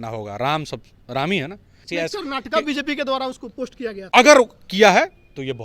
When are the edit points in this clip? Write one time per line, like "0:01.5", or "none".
0:01.8
0:04.0